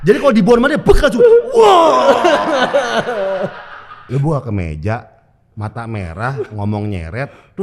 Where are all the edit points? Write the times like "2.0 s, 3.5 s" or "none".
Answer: 3.9 s